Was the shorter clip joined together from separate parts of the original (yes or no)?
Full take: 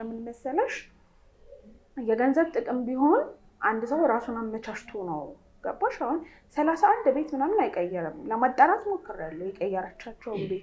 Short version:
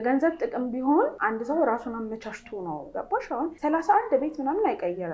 yes